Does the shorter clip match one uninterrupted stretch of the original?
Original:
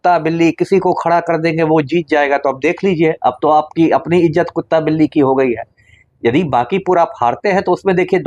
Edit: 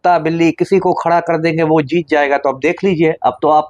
yes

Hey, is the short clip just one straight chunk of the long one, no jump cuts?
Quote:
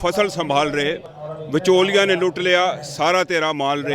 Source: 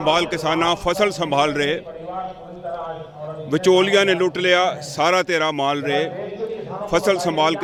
no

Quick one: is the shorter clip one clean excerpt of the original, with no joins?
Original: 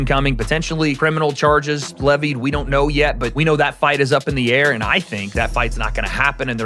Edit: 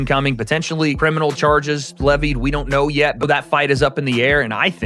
no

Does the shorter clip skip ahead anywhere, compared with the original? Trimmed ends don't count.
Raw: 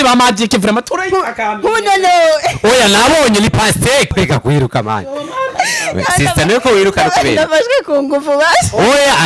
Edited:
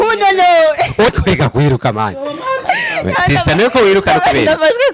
yes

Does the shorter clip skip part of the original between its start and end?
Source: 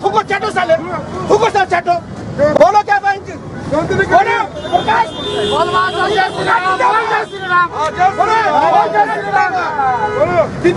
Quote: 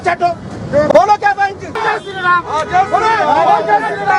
yes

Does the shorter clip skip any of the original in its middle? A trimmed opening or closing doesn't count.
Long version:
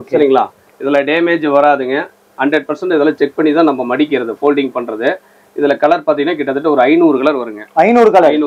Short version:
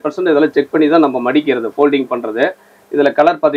no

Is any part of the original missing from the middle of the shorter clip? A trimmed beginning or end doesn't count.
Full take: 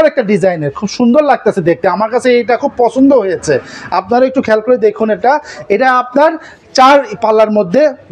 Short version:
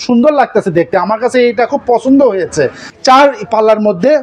yes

